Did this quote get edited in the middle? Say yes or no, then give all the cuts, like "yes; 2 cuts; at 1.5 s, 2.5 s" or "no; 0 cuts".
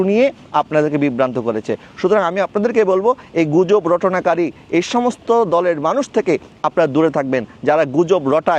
no; 0 cuts